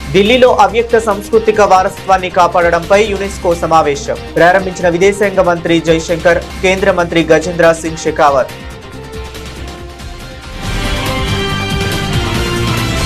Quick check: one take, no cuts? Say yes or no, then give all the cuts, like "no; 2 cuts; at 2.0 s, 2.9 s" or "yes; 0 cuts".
yes; 0 cuts